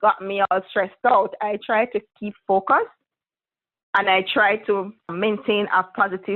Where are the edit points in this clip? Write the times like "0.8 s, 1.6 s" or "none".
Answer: 5.1 s

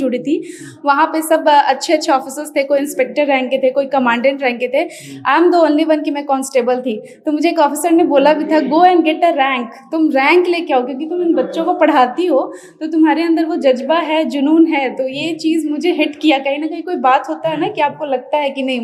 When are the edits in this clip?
none

